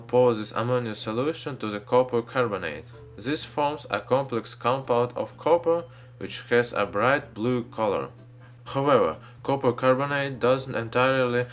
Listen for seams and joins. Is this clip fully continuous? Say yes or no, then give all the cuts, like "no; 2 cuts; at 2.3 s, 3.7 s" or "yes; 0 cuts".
yes; 0 cuts